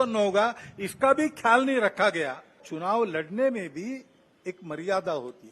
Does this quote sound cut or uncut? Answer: cut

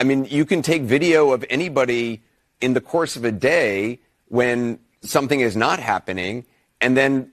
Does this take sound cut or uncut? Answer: cut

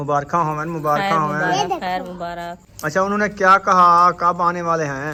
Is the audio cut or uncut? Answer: uncut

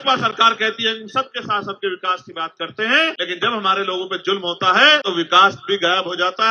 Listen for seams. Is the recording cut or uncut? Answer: cut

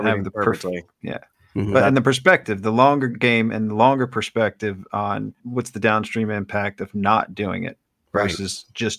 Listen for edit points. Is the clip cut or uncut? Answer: cut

